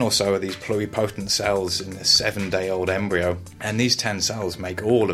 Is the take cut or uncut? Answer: cut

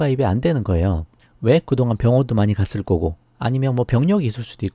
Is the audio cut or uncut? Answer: cut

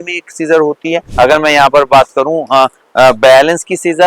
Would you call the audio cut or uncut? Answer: cut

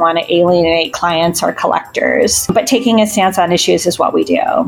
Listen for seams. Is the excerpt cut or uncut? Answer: cut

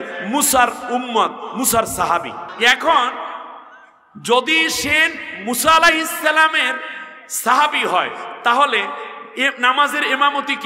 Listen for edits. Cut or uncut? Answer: cut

